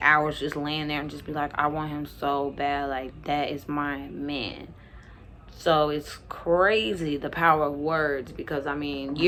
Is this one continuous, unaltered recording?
yes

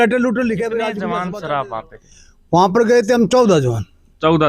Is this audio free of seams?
no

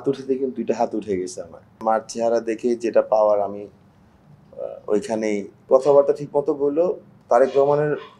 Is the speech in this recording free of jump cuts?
no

